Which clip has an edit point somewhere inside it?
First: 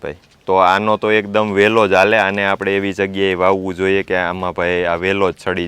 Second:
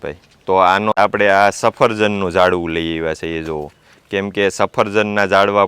second; 1 cut; at 0.9 s

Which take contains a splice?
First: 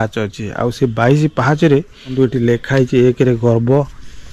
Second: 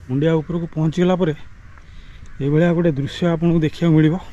first; 1 cut; at 2.2 s

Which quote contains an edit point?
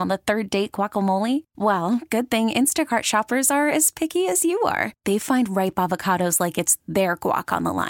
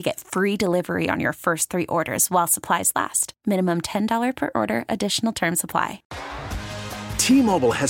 second; 1 cut; at 6.1 s

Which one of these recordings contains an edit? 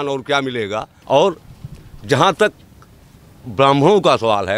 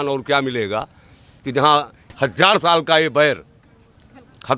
first; 1 cut; at 0.9 s

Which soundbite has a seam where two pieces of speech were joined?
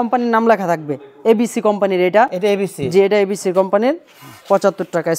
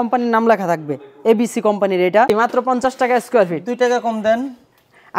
second; 1 cut; at 2.3 s

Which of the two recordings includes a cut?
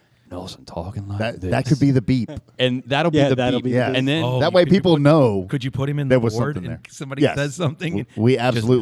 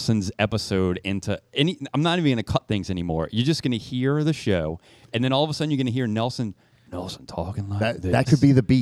first; 1 cut; at 6.9 s

